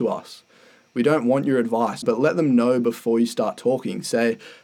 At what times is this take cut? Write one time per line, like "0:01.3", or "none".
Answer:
0:02.0